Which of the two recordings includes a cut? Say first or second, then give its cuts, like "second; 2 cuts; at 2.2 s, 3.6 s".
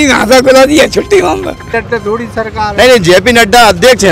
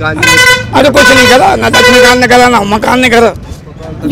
first; 1 cut; at 1.7 s